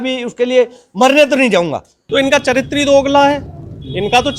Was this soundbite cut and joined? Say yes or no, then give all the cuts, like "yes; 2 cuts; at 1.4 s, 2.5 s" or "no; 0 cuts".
yes; 1 cut; at 2.0 s